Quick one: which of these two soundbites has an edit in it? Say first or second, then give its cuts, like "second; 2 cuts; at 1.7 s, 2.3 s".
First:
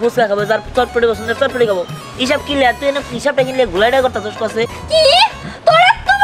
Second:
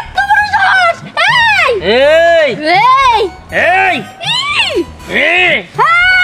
first; 1 cut; at 4.7 s